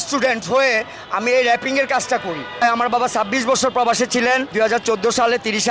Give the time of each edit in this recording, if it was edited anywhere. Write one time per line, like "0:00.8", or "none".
0:02.6
0:04.5